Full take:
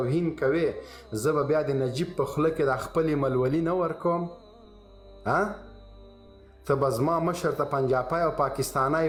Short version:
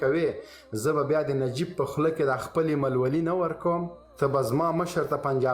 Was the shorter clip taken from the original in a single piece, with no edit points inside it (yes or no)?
no